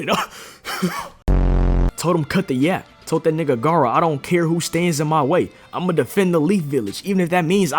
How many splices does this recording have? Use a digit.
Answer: 1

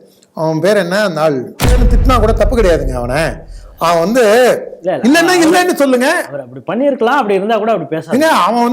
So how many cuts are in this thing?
1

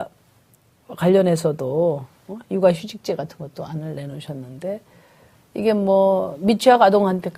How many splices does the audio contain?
1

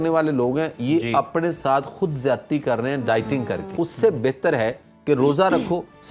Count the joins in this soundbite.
1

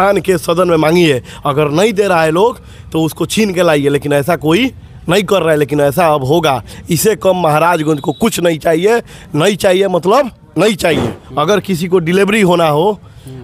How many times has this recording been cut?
1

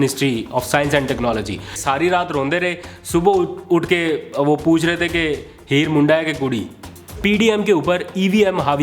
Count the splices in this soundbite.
2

